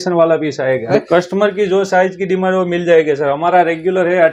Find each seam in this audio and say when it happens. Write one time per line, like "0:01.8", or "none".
0:00.9